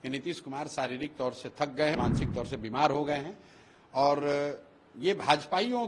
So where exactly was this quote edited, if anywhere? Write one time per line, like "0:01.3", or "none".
0:02.0